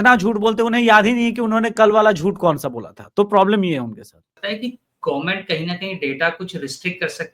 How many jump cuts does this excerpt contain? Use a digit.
1